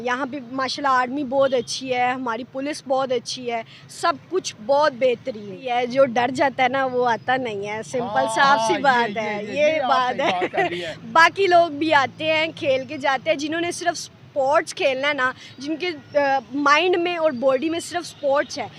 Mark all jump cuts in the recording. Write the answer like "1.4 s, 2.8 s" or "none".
5.6 s